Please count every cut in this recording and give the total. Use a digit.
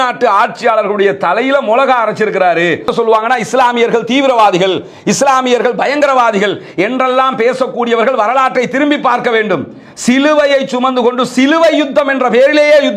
1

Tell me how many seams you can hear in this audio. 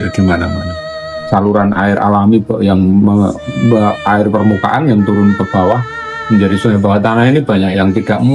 1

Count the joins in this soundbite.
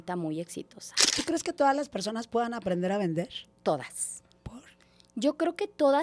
2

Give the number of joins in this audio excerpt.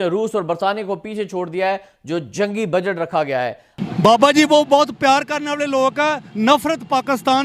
1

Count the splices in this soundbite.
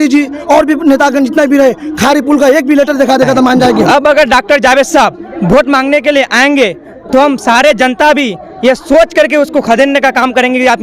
1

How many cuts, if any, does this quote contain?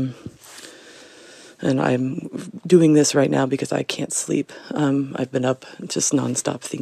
0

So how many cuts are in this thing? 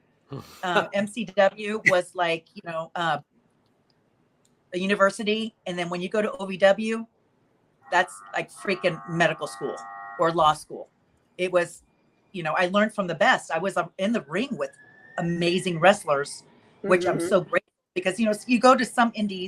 0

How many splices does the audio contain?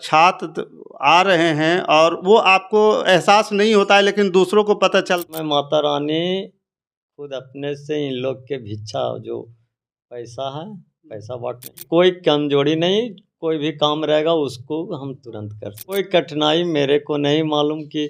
3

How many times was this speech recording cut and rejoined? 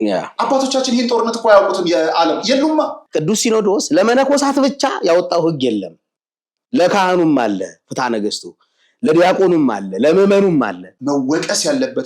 2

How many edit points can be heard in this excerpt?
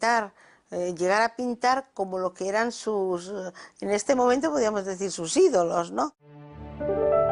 1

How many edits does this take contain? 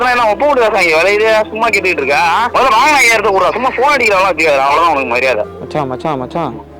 2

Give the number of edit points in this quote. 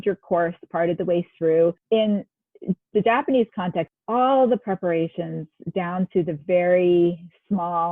2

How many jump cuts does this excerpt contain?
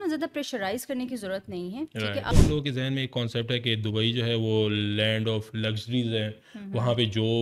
1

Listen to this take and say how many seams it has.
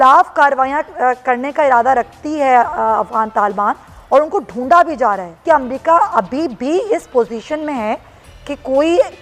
1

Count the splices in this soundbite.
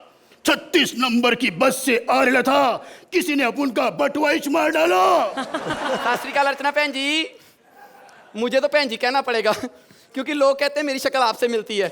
1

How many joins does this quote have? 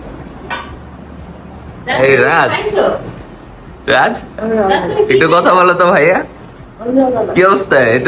0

